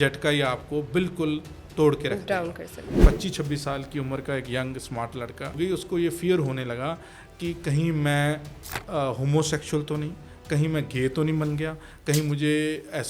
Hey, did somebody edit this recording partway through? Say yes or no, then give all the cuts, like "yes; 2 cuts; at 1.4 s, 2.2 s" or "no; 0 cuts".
yes; 2 cuts; at 3.0 s, 5.5 s